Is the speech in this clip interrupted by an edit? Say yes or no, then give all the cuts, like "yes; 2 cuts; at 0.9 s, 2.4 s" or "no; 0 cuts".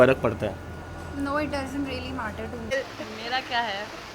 yes; 1 cut; at 2.7 s